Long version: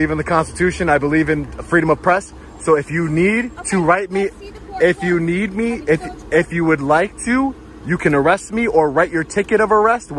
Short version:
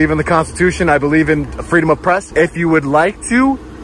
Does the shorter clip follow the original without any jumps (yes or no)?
no